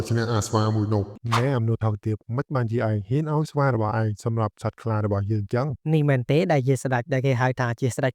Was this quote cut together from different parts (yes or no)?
yes